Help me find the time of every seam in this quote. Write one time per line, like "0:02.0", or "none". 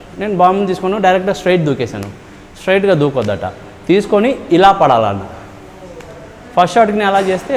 none